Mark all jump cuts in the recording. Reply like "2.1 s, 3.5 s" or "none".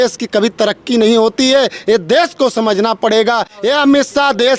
3.5 s